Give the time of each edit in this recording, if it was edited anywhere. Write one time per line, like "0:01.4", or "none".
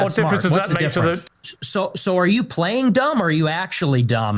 0:01.2